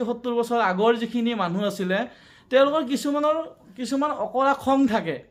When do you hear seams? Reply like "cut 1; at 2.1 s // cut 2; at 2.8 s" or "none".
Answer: none